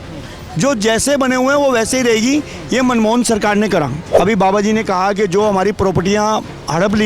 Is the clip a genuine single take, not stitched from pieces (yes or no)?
no